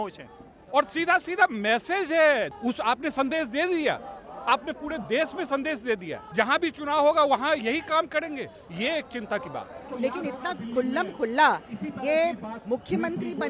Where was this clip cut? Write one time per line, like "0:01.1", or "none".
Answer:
0:02.5
0:06.2
0:09.9